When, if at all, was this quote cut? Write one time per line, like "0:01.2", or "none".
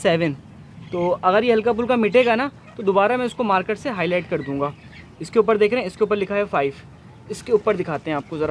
none